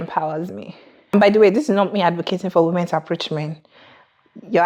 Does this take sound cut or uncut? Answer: cut